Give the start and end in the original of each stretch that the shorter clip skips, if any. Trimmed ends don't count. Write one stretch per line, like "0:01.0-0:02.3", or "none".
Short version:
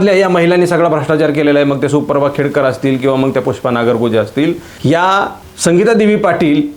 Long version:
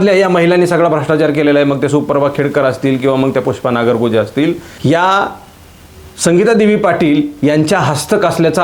0:05.4-0:06.0